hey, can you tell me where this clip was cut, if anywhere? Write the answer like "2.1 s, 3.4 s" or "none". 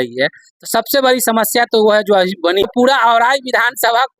2.6 s